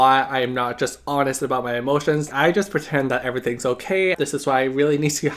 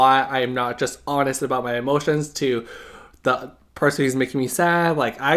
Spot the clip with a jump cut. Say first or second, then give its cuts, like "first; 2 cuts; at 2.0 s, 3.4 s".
first; 2 cuts; at 2.3 s, 4.1 s